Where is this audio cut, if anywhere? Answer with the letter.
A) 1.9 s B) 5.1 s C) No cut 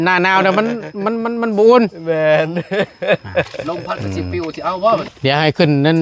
B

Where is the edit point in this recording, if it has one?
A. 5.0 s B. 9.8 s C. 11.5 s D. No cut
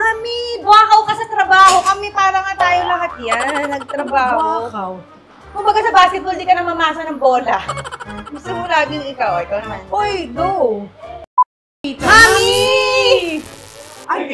C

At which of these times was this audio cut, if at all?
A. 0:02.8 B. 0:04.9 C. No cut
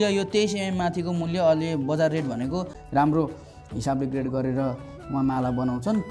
A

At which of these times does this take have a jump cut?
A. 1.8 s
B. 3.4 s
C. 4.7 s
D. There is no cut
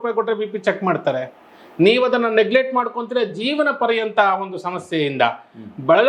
D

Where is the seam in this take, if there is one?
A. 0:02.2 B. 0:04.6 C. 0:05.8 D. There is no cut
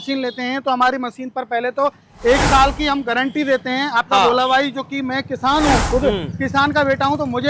D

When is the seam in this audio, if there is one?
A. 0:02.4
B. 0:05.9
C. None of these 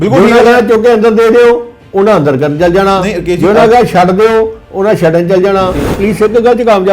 B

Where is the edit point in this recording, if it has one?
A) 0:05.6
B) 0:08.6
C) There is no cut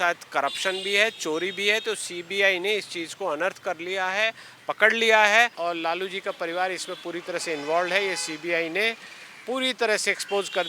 A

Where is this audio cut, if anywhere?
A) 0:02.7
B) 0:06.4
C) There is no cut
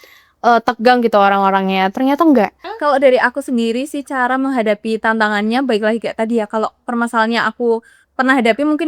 A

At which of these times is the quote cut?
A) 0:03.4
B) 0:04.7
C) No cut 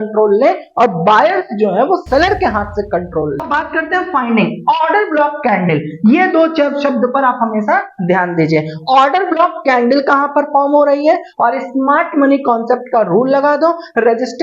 A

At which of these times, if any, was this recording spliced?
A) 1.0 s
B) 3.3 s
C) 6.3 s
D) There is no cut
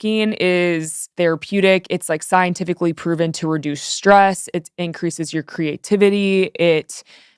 A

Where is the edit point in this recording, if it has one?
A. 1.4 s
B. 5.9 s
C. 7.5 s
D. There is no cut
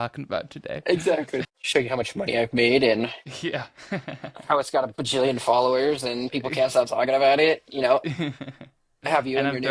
A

